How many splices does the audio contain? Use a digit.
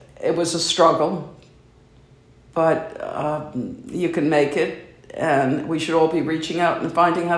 0